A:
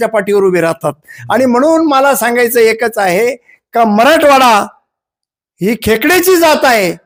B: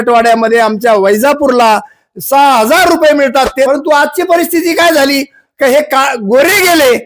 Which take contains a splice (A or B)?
B